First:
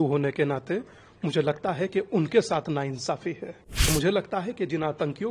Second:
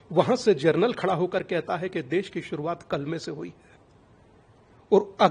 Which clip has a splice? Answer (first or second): first